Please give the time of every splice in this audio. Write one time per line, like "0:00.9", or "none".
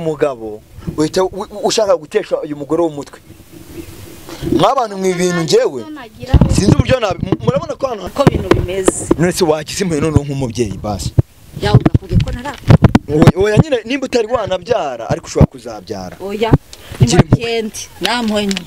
0:08.0